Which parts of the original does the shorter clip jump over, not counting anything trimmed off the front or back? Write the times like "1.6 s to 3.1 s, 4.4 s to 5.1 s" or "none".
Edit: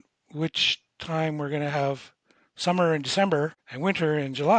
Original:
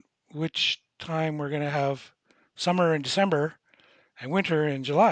3.6 s to 4.1 s